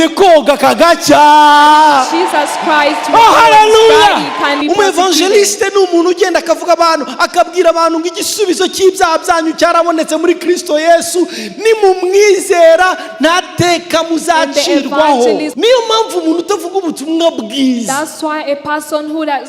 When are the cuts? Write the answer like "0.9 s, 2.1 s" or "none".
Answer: 4.6 s, 15.5 s